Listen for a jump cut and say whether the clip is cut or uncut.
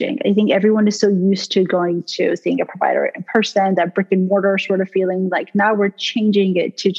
uncut